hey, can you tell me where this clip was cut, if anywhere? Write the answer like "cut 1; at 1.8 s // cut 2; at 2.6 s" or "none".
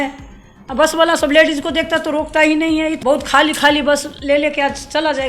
cut 1; at 3.0 s